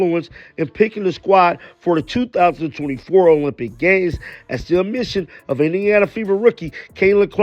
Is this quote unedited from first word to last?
yes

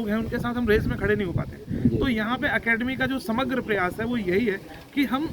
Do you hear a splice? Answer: no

